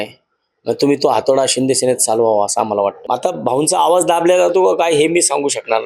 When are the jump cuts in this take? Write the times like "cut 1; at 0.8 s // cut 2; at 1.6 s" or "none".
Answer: cut 1; at 3.0 s